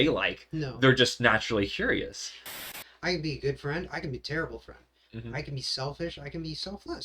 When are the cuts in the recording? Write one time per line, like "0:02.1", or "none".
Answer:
0:02.6